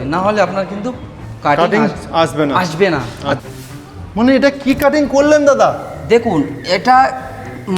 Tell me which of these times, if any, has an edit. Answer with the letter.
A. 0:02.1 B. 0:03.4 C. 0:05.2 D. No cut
B